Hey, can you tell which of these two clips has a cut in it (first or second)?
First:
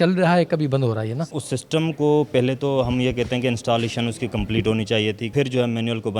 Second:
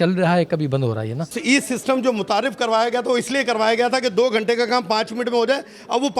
first